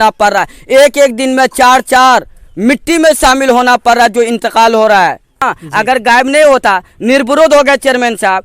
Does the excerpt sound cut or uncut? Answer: cut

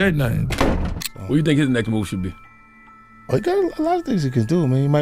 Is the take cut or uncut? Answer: cut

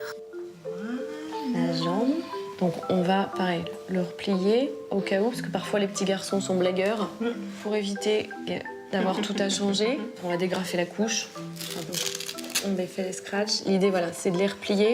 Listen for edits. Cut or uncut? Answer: cut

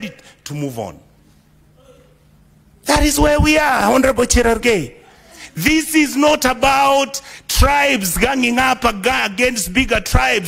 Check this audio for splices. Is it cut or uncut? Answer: uncut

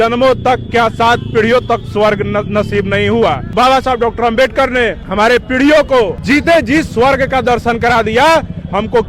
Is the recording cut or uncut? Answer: cut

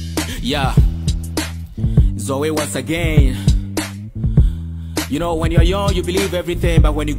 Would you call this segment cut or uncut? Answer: cut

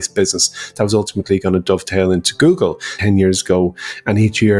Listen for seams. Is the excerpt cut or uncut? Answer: cut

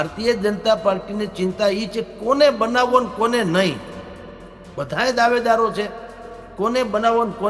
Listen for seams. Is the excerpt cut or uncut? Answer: uncut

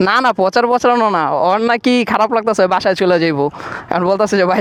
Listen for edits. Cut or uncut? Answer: uncut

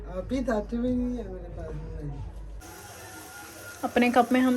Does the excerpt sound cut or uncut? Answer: cut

